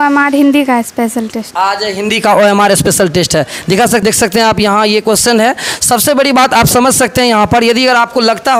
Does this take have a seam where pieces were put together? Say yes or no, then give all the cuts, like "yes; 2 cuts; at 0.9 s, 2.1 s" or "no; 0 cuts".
no; 0 cuts